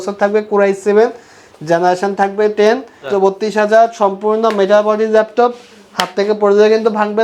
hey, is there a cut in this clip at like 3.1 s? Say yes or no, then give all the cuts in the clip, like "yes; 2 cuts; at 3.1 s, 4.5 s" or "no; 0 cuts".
yes; 1 cut; at 3.1 s